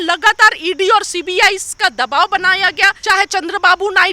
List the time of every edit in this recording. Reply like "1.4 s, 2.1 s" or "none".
3.0 s